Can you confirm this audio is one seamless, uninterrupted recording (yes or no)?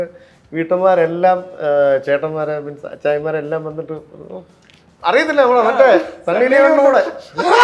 yes